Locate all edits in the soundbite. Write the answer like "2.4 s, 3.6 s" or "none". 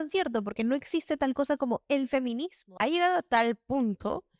2.6 s